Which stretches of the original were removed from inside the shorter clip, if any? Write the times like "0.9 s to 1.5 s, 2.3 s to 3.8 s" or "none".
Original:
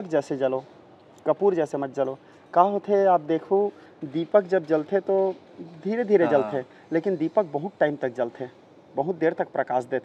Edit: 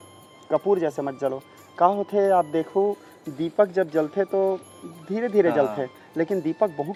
none

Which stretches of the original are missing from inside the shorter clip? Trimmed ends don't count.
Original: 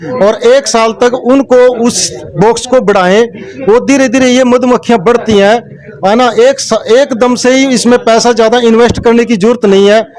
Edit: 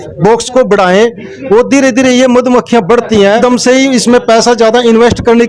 5.6 s to 7.2 s

